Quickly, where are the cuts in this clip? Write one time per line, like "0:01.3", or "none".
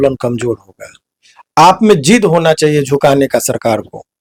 none

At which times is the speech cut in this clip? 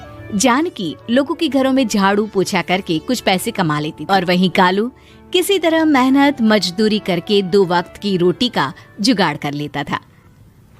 0:03.9

